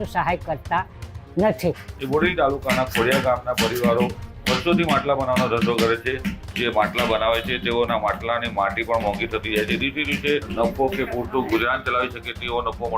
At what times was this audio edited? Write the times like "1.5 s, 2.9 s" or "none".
1.9 s, 6.4 s, 10.5 s